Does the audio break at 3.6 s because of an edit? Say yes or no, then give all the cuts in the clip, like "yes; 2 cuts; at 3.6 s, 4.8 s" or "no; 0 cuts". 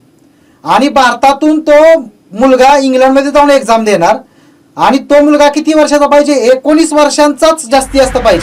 no; 0 cuts